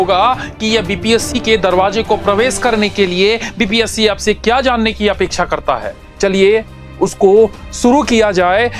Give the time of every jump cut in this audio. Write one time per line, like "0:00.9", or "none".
0:06.0